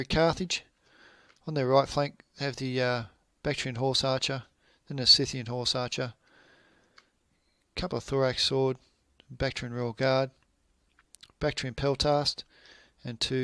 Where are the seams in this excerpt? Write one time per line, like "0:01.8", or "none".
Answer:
0:06.2